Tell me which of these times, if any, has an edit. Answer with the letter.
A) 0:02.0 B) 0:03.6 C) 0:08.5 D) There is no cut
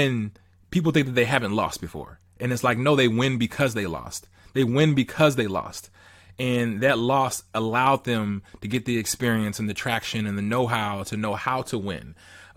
D